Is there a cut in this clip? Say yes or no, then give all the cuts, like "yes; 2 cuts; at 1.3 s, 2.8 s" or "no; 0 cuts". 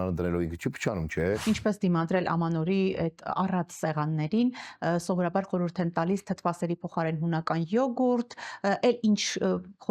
yes; 1 cut; at 1.4 s